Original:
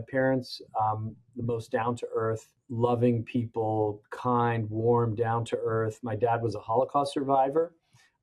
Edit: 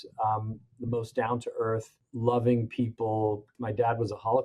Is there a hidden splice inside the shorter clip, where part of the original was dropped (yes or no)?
yes